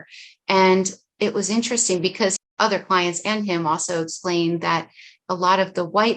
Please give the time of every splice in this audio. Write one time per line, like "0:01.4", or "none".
0:02.4